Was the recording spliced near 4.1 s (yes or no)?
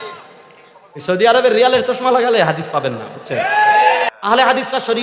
yes